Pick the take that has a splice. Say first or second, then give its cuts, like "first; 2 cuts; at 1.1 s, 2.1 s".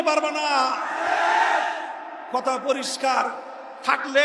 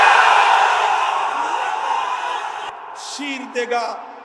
second; 1 cut; at 2.7 s